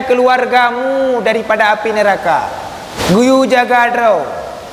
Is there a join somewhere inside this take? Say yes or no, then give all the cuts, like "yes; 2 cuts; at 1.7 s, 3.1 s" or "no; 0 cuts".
no; 0 cuts